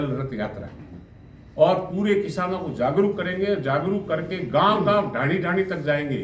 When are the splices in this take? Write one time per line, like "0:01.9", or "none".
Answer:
none